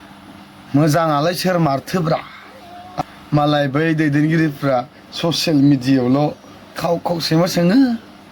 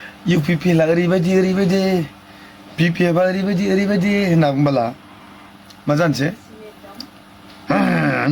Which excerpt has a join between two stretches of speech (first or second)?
first